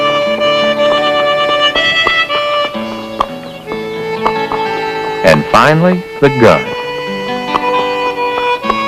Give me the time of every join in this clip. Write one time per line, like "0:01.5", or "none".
none